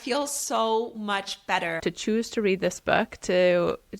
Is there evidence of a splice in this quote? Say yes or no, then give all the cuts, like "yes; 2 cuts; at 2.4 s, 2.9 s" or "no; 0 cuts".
yes; 1 cut; at 1.8 s